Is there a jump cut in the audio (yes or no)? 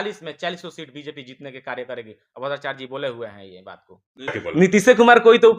yes